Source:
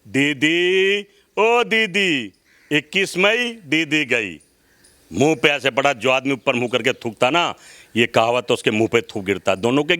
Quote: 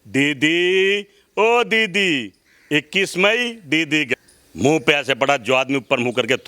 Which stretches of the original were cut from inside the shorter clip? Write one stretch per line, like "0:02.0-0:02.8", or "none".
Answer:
0:04.1-0:04.7